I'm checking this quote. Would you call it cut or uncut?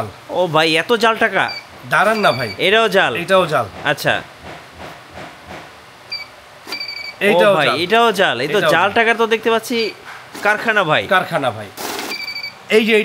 cut